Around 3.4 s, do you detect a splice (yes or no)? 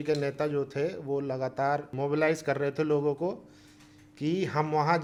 no